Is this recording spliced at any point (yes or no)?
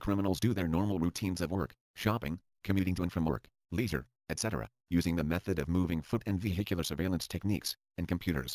no